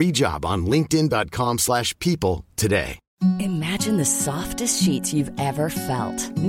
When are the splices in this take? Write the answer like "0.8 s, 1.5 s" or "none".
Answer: 3.0 s